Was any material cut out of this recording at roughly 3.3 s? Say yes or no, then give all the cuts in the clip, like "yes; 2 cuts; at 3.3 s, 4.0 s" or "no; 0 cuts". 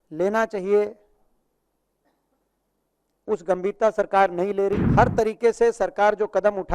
no; 1 cut; at 4.8 s